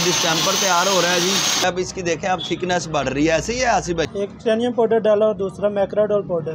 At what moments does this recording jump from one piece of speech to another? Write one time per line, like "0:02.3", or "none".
0:01.6
0:04.1